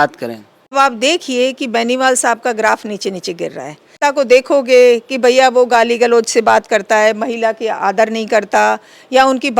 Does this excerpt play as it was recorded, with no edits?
no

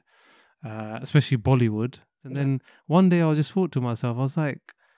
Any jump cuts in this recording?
yes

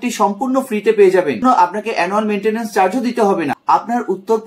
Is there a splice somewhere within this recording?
yes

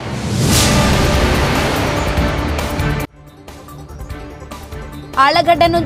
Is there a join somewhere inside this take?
yes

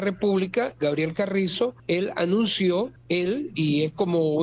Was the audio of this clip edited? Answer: yes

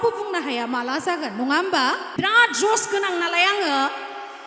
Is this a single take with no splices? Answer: no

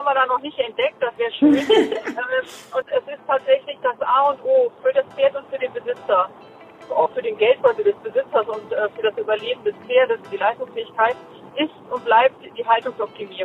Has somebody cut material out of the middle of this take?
yes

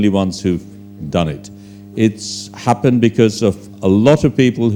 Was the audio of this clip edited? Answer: no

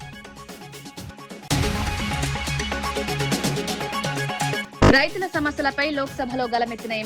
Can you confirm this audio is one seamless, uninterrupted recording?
no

